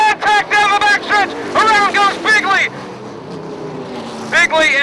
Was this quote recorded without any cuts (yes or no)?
yes